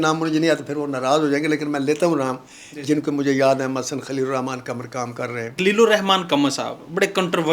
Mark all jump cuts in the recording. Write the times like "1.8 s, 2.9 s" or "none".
5.5 s